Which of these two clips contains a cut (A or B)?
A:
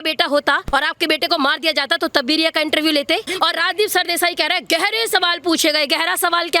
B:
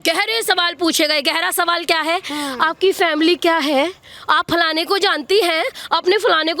A